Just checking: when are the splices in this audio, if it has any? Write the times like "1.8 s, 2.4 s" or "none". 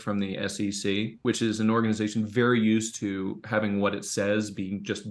1.2 s